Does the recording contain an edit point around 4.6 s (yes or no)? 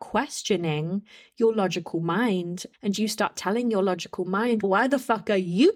yes